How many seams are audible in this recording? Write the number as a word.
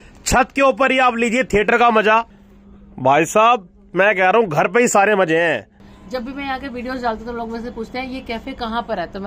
two